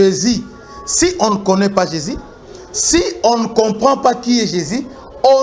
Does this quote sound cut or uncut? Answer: uncut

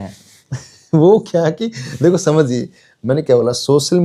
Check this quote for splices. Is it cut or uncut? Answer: uncut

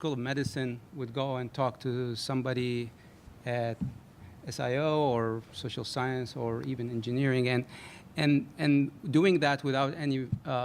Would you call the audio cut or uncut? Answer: cut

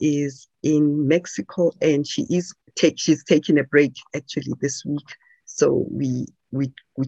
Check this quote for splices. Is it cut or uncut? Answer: cut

